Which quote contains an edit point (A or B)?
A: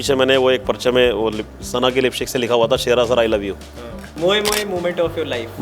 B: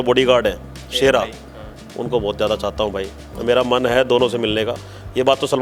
A